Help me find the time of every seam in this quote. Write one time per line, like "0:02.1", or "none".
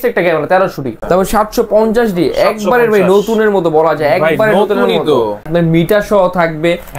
0:01.0
0:05.5